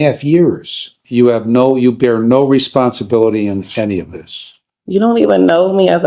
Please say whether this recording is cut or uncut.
cut